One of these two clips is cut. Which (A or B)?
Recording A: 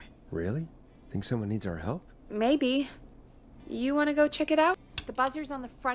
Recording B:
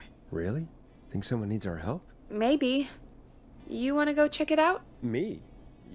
A